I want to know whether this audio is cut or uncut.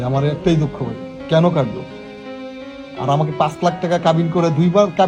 uncut